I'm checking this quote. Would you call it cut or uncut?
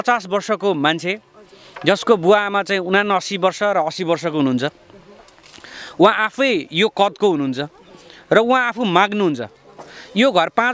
uncut